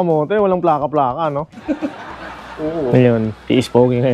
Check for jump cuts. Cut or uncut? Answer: uncut